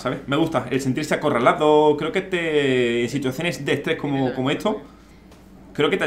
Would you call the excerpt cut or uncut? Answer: uncut